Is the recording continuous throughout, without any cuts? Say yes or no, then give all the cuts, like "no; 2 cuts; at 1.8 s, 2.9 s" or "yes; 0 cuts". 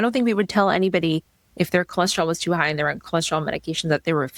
yes; 0 cuts